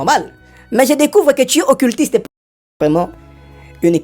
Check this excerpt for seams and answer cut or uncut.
cut